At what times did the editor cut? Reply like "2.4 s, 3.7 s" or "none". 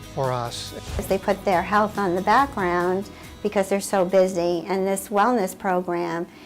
1.0 s